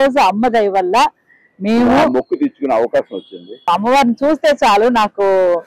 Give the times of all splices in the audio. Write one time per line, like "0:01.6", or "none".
0:03.7